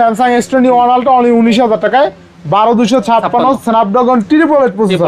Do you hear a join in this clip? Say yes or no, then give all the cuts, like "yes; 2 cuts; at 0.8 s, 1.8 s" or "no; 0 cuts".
no; 0 cuts